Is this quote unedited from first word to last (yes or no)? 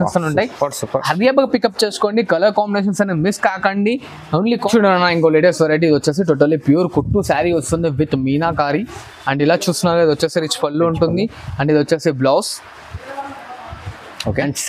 no